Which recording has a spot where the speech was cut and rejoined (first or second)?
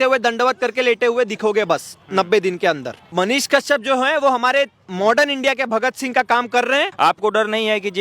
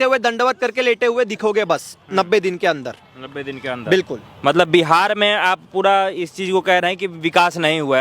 first